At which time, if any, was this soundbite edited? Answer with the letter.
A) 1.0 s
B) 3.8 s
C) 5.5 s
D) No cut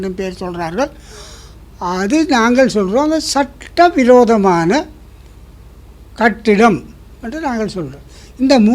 D